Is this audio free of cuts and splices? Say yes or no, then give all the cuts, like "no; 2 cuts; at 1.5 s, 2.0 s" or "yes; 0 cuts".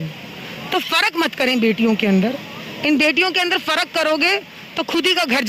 yes; 0 cuts